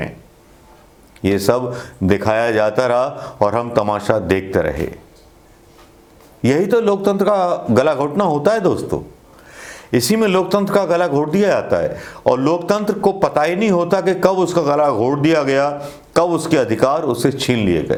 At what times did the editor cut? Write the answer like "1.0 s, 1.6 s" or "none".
none